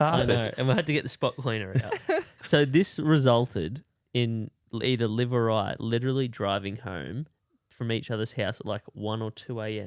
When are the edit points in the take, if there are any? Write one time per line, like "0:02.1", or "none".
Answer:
0:02.4
0:04.6